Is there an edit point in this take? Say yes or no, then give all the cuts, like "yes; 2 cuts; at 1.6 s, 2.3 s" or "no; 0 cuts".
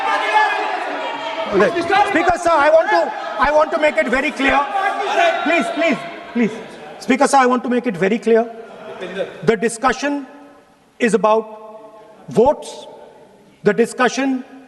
no; 0 cuts